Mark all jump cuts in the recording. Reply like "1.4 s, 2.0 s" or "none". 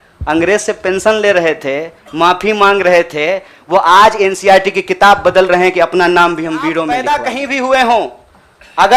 7.0 s

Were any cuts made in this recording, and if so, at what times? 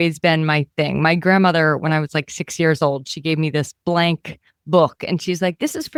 none

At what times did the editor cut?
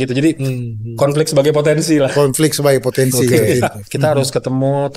3.9 s

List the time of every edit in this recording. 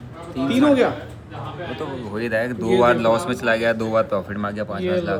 none

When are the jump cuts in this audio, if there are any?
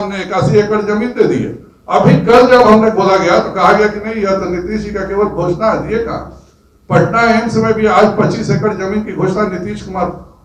none

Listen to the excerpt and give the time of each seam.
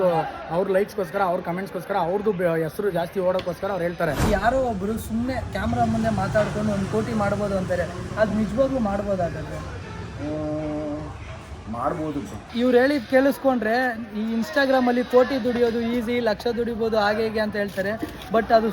4.2 s, 12.5 s

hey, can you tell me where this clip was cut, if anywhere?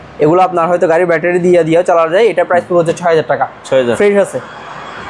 none

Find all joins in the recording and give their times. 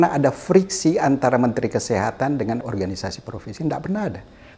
2.6 s

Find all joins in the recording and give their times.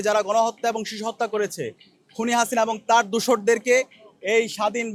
none

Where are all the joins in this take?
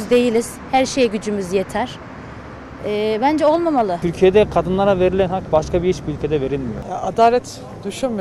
4.0 s, 6.8 s

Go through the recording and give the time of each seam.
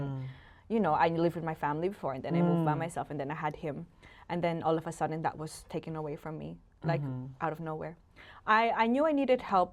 none

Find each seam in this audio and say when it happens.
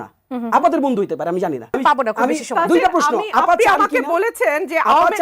1.7 s

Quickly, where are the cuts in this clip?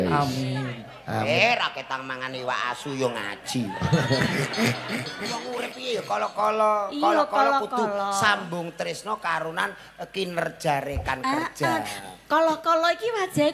5.4 s

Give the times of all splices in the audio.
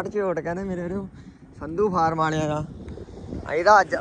none

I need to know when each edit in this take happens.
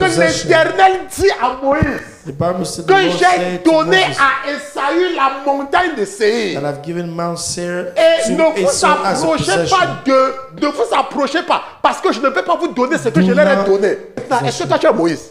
14.2 s

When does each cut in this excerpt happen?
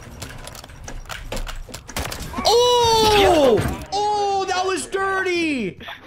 3.8 s

